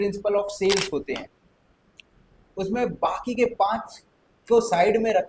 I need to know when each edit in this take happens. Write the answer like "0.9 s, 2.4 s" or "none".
none